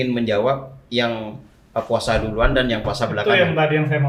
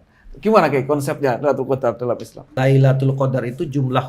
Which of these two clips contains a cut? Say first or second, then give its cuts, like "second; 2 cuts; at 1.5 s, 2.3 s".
second; 1 cut; at 2.6 s